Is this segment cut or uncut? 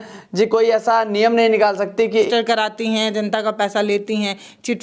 cut